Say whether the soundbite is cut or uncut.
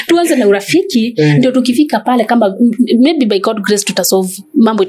uncut